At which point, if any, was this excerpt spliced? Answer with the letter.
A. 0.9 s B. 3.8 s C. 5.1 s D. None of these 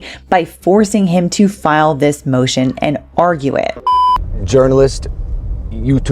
B